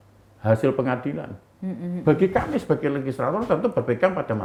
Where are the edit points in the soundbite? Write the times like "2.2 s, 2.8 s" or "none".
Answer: none